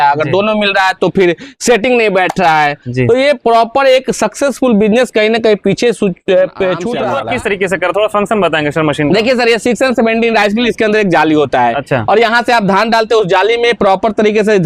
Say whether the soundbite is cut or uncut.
cut